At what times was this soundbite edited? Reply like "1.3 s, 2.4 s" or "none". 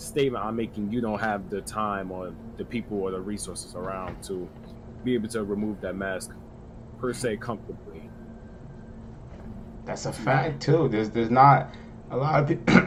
none